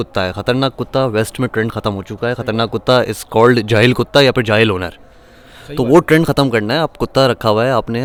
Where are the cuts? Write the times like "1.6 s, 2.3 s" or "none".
none